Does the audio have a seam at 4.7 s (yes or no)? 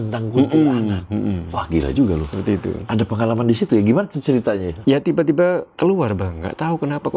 yes